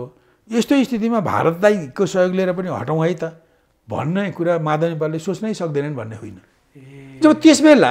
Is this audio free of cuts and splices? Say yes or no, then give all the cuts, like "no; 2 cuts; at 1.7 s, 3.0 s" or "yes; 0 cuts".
yes; 0 cuts